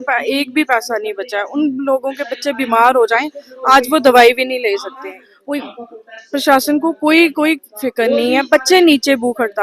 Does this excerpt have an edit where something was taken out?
yes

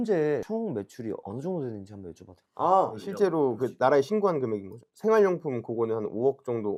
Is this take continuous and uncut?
yes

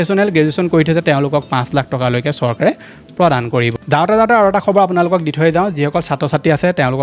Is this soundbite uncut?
yes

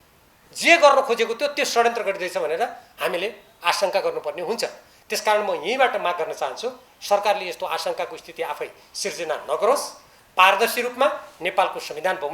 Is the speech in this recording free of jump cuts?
yes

